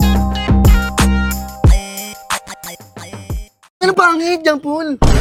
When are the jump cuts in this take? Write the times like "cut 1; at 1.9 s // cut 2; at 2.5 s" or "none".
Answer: none